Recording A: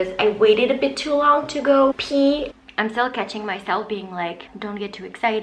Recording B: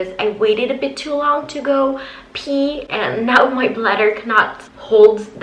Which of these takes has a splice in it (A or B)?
A